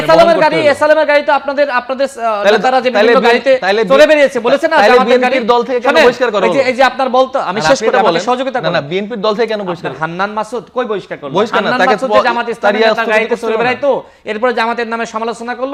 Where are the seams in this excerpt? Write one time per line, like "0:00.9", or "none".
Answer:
none